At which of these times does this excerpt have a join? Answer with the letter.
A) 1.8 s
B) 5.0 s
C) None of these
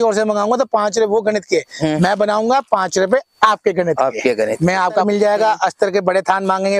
B